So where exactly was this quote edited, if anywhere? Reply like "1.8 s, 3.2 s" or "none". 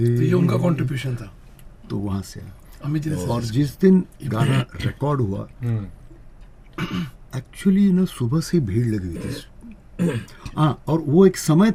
none